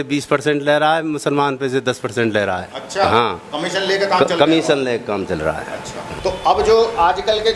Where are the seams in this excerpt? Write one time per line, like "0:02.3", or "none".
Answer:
0:06.0